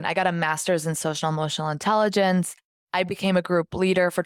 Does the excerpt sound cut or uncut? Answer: uncut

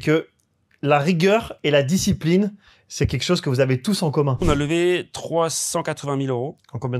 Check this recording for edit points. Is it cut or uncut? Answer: cut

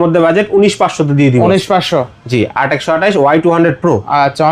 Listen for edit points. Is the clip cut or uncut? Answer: uncut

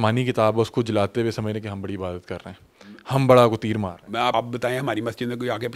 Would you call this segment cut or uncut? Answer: cut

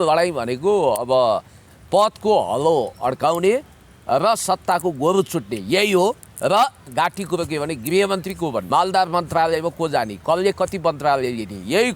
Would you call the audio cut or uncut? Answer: cut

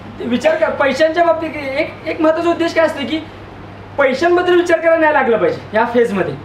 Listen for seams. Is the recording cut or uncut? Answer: uncut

